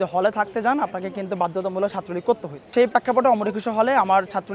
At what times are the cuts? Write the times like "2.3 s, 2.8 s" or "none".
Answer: 2.7 s